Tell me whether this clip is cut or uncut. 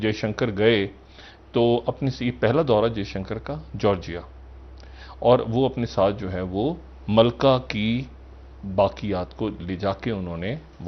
uncut